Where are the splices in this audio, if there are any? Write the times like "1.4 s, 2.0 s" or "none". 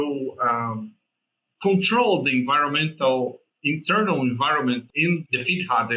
4.9 s